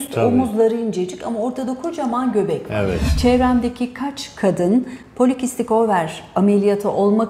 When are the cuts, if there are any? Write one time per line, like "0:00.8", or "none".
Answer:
0:03.1